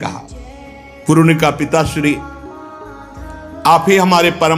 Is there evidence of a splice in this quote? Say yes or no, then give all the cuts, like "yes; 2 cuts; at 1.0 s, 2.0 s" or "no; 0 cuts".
yes; 2 cuts; at 2.2 s, 3.6 s